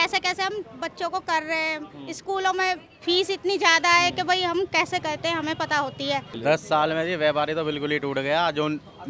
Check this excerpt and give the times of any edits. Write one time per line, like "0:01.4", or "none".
0:06.3

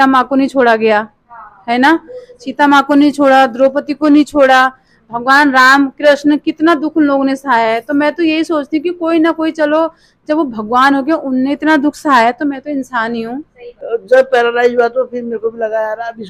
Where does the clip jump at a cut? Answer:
0:13.8

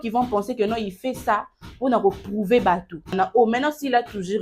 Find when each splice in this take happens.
0:03.1

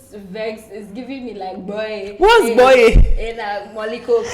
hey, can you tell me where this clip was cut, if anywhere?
none

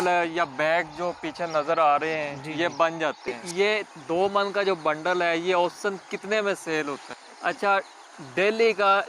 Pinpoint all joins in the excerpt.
0:03.4
0:07.2

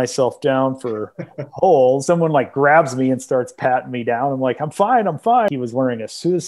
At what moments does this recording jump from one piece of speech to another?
0:02.0
0:05.5

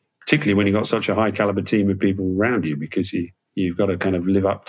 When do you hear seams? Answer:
0:03.4

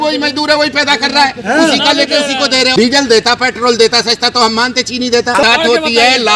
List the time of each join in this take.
0:02.7
0:05.4

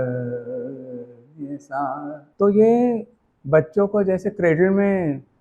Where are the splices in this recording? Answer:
0:02.2

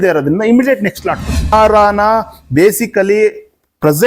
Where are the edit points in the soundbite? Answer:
0:01.5

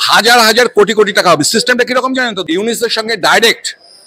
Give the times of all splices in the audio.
0:02.3

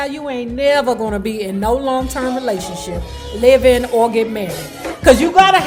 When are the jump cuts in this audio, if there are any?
none

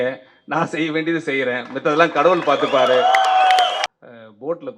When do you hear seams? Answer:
0:03.9

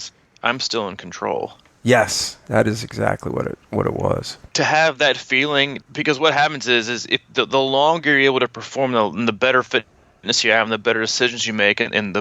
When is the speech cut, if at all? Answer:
0:04.5
0:05.8

